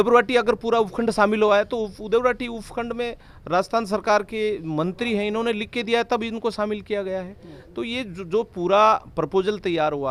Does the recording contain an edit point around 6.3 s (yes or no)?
no